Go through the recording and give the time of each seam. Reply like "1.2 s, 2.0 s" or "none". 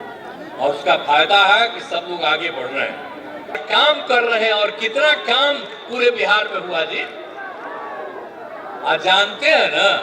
3.6 s